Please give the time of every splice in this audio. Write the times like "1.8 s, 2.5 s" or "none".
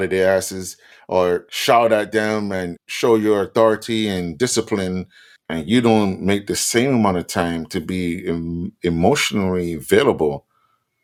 none